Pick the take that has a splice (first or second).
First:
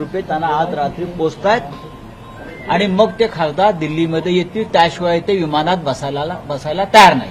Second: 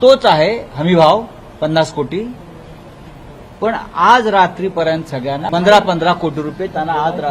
second